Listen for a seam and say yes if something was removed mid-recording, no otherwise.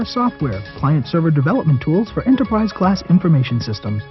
no